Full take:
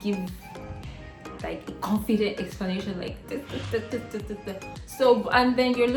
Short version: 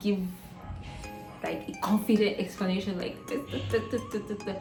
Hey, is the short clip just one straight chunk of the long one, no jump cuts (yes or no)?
yes